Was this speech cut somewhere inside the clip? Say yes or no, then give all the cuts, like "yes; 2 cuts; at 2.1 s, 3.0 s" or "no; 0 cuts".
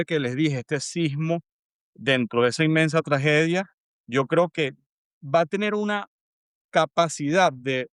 no; 0 cuts